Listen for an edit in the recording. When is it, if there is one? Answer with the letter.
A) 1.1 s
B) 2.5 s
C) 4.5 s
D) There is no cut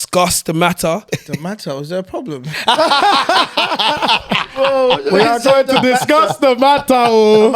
A